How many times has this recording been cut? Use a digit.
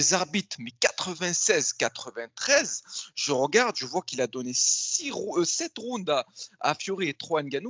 0